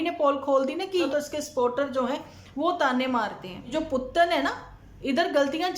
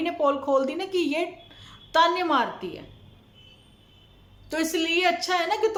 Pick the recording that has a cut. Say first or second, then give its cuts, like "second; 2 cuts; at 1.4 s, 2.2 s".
first; 2 cuts; at 1.1 s, 3.7 s